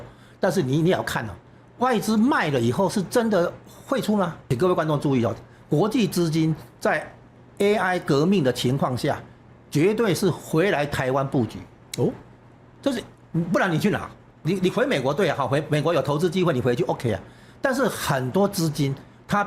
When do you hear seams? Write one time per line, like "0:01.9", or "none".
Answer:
0:04.4
0:14.4